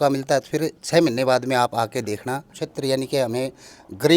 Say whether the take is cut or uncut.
cut